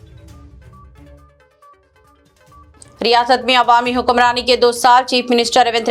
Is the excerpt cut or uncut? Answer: cut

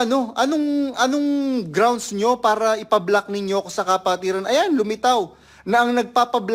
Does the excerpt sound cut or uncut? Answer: uncut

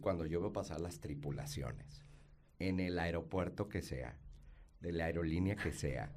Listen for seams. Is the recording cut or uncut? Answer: uncut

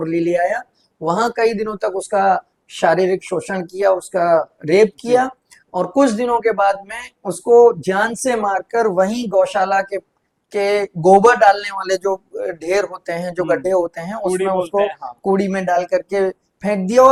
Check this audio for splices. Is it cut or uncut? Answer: uncut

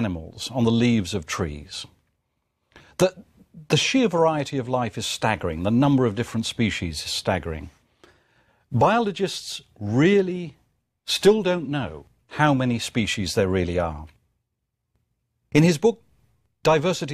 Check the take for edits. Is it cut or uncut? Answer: cut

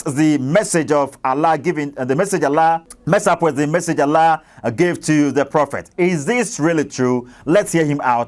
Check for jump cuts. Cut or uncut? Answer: cut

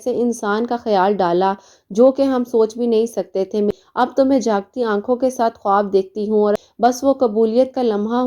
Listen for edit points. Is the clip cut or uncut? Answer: cut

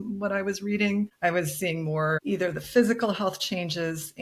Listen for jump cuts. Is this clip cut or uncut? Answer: cut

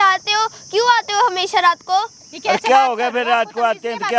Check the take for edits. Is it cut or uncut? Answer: uncut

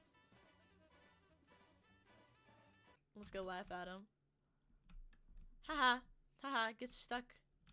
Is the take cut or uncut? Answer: uncut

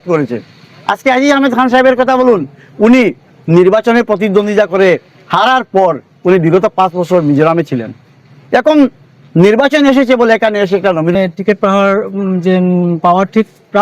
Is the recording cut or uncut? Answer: cut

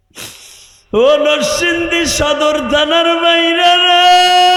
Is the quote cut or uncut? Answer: uncut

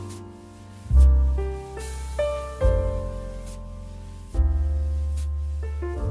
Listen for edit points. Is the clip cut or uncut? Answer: uncut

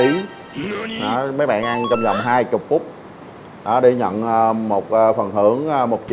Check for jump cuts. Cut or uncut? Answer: uncut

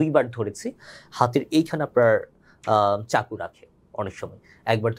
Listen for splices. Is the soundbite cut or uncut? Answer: uncut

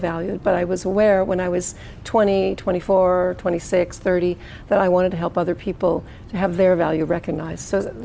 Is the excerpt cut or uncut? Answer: uncut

